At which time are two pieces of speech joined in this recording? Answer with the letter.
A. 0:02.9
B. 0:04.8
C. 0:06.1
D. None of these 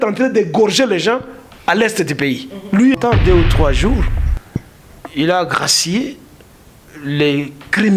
A